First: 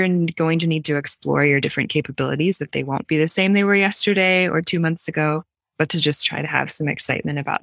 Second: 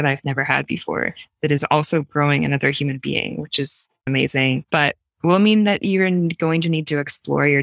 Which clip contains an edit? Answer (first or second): second